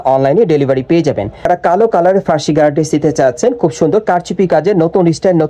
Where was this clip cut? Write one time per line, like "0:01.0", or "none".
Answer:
0:01.5